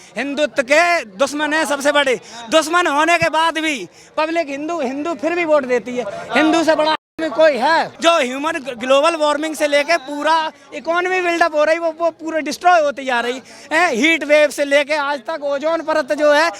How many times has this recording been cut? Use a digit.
1